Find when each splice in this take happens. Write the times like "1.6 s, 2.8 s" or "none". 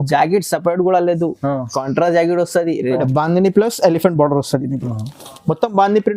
3.0 s